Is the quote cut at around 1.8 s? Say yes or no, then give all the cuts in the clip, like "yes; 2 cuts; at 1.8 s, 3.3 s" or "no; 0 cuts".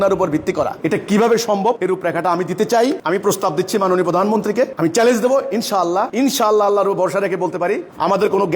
yes; 2 cuts; at 1.8 s, 6.1 s